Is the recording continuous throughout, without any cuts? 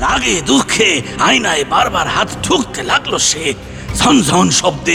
yes; 0 cuts

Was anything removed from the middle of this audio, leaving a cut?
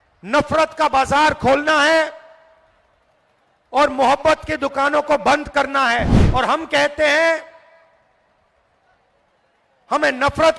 yes; 1 cut; at 6.2 s

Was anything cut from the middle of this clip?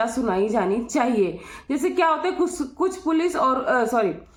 no; 0 cuts

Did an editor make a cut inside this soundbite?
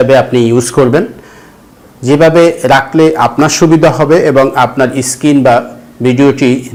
no; 0 cuts

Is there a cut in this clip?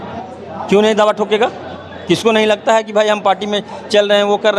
no; 0 cuts

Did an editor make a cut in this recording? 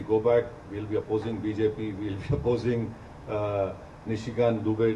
no; 0 cuts

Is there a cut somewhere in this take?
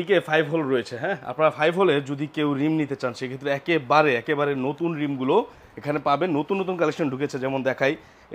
no; 0 cuts

